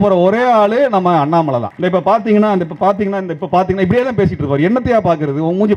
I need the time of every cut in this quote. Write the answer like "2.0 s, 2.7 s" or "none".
1.7 s